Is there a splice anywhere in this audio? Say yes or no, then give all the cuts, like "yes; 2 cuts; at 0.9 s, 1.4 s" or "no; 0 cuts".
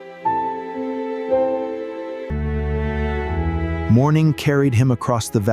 yes; 1 cut; at 2.3 s